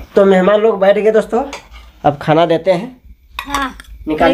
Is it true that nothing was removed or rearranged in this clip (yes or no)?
yes